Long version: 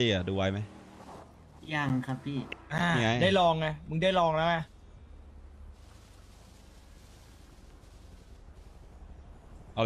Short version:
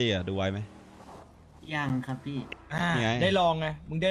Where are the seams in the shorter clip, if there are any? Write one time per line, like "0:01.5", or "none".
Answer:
none